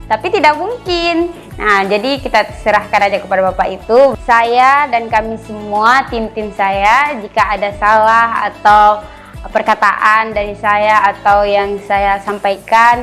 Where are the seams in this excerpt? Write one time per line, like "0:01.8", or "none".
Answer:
0:04.1